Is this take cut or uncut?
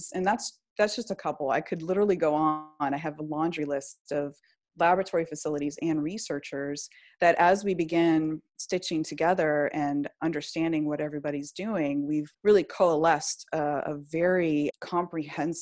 cut